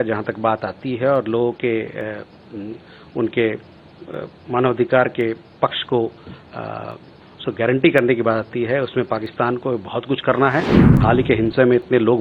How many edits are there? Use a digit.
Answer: 1